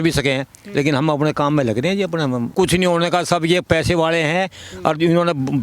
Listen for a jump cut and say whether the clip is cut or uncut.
cut